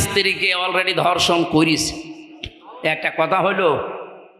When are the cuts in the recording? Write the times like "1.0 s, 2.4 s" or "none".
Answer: none